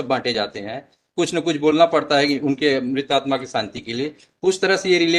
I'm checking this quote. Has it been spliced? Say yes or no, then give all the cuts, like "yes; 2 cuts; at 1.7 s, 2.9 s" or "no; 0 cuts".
no; 0 cuts